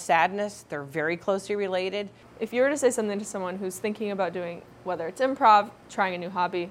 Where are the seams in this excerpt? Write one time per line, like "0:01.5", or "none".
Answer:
0:02.2
0:05.8